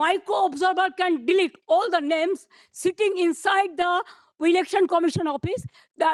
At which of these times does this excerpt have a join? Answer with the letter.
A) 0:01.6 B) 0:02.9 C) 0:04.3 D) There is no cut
D